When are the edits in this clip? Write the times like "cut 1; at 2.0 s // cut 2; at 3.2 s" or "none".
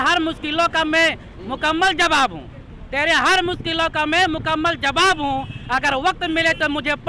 none